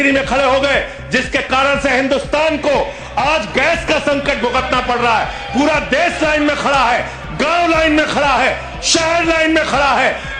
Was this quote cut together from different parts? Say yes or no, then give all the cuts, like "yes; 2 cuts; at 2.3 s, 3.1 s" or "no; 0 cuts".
no; 0 cuts